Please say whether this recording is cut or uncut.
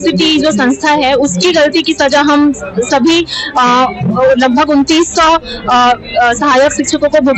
uncut